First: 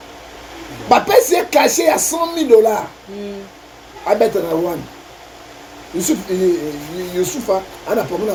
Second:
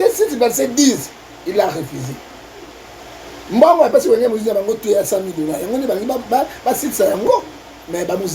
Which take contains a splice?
second; 1 cut; at 7.2 s

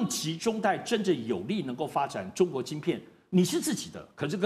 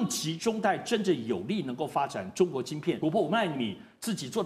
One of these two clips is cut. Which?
second; 1 cut; at 3.0 s

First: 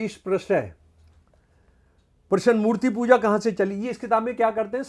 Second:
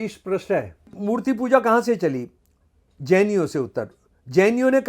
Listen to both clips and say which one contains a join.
second; 1 cut; at 0.9 s

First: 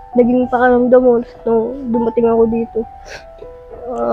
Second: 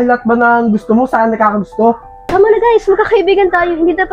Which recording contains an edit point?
second; 1 cut; at 2.1 s

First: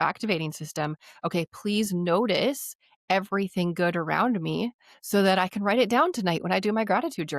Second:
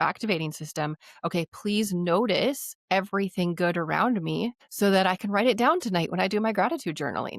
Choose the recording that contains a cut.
second; 2 cuts; at 2.7 s, 4.6 s

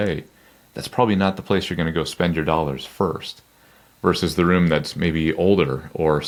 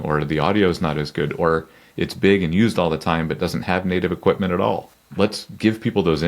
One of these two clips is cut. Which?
second; 1 cut; at 5.0 s

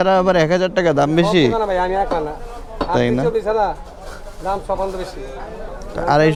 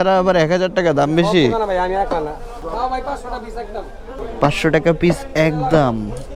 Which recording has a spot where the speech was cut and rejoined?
second; 2 cuts; at 2.6 s, 4.2 s

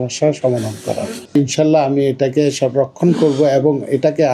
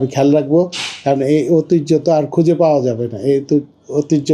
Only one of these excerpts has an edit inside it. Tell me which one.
first; 1 cut; at 1.1 s

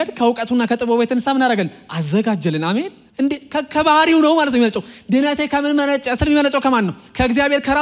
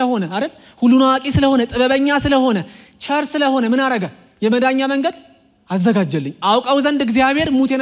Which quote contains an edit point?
first; 1 cut; at 3.0 s

